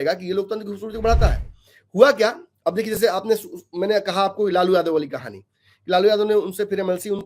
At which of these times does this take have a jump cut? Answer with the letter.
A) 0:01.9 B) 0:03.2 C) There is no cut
C